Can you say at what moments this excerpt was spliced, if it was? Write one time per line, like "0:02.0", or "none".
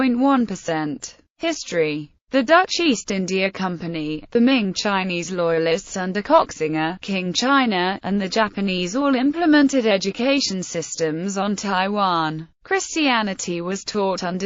none